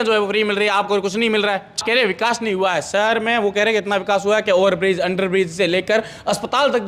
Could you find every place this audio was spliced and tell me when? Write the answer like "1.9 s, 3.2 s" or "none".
1.8 s